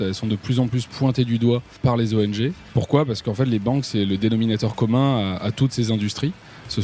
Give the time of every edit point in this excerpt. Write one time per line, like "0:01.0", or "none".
0:01.8
0:02.6